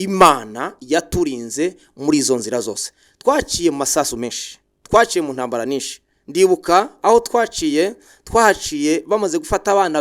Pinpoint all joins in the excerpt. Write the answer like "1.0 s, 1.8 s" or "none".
none